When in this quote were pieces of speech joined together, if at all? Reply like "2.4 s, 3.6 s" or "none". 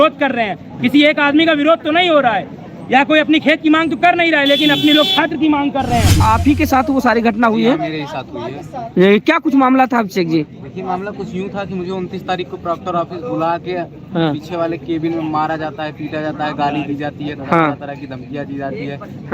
6.2 s

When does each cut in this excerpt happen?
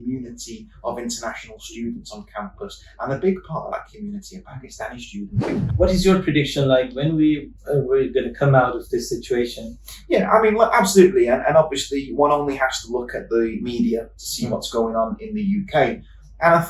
5.6 s

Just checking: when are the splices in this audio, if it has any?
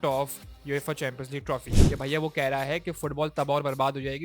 1.7 s

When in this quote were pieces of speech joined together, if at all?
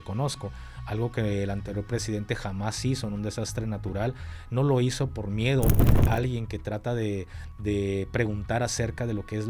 5.8 s

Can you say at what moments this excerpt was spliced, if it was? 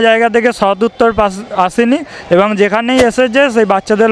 none

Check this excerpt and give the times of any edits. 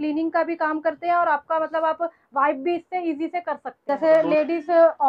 3.7 s

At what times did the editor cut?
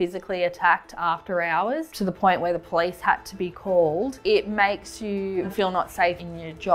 1.9 s, 4.2 s, 5.8 s

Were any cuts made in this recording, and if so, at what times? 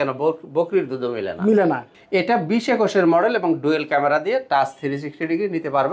1.9 s

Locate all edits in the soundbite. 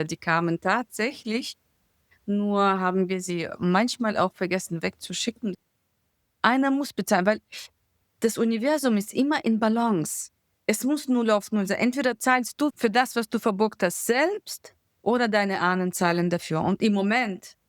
5.6 s, 12.7 s

